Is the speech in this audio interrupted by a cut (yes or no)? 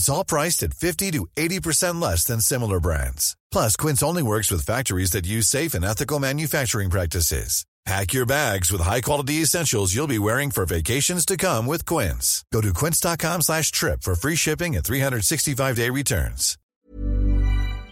yes